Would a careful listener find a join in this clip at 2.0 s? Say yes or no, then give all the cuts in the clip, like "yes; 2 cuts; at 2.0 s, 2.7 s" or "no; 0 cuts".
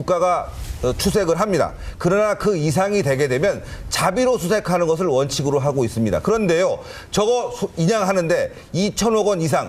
no; 1 cut; at 5.3 s